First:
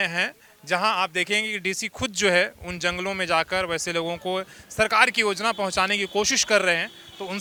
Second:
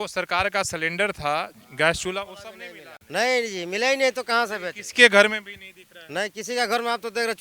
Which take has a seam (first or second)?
second